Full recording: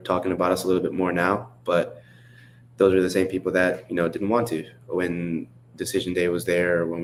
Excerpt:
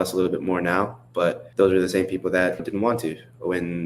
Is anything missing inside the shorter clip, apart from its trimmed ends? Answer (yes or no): yes